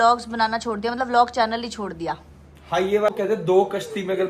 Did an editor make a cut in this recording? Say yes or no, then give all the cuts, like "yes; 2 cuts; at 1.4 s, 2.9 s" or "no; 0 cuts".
yes; 1 cut; at 3.1 s